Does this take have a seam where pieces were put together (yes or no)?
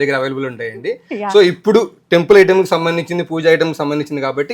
no